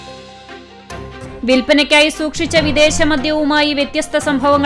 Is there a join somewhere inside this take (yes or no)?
yes